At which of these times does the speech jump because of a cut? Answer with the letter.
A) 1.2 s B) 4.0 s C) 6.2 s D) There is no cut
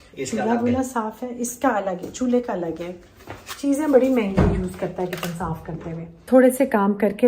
C